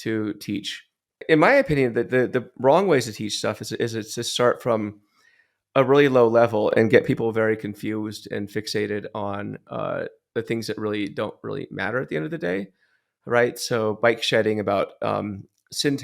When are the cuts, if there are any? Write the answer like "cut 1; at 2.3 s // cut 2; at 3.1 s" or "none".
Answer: cut 1; at 1.2 s